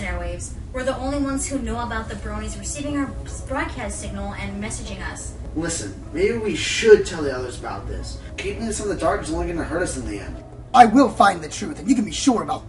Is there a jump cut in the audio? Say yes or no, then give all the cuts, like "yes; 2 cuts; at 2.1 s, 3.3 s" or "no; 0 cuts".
no; 0 cuts